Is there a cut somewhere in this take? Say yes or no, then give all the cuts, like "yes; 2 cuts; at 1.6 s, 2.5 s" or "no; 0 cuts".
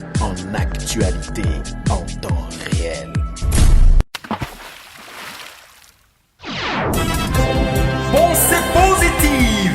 yes; 1 cut; at 4.1 s